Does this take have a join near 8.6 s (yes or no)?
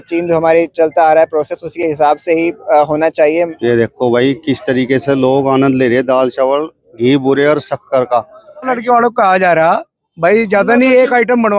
yes